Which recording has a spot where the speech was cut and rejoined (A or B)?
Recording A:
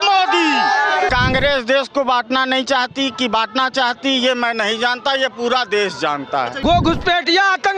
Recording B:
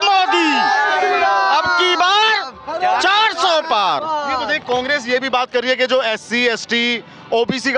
A